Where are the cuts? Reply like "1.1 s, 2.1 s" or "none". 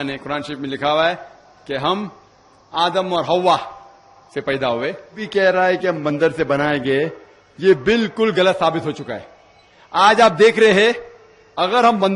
5.2 s